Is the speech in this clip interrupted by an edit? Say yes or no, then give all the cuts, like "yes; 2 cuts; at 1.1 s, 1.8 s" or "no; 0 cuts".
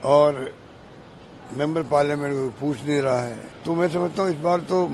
yes; 1 cut; at 3.5 s